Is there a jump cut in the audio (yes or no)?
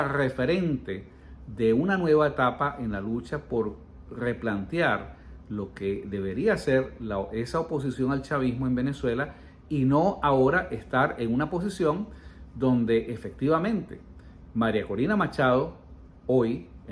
no